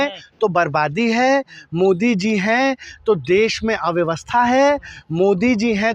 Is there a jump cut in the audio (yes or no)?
no